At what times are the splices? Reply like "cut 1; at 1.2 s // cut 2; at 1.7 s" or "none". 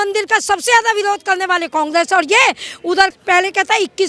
cut 1; at 3.1 s

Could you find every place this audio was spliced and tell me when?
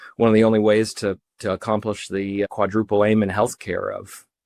none

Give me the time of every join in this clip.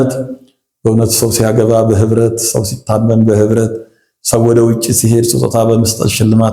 none

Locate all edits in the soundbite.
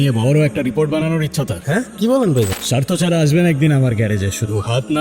cut 1; at 2.6 s

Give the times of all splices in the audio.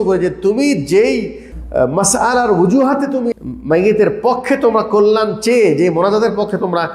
cut 1; at 1.5 s // cut 2; at 3.3 s

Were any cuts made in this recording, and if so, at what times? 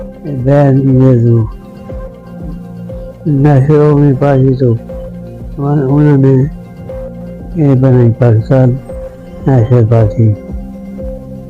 cut 1; at 1.5 s // cut 2; at 3.2 s

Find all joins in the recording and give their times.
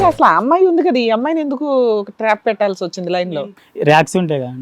cut 1; at 3.4 s

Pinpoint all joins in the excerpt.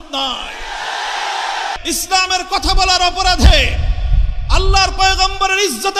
cut 1; at 1.8 s

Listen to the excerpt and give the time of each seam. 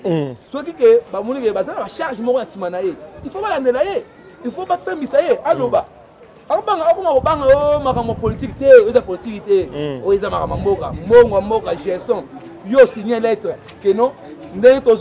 none

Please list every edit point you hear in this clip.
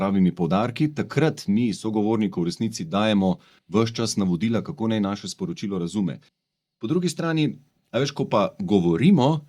cut 1; at 6.3 s

